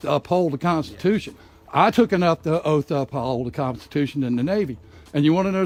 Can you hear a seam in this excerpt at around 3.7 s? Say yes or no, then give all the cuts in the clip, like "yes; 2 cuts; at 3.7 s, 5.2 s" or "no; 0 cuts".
no; 0 cuts